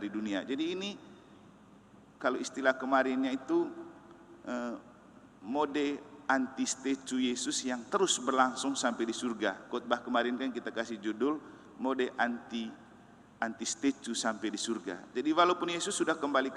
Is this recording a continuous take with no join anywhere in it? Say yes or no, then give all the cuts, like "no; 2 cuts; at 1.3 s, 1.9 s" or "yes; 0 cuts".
yes; 0 cuts